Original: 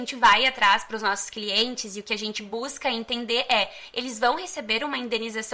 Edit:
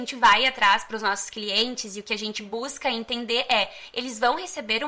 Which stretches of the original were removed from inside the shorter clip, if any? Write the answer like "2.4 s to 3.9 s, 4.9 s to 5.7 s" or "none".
none